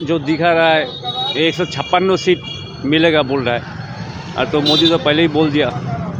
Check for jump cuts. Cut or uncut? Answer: uncut